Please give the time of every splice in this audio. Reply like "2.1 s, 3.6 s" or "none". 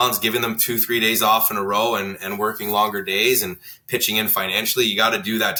none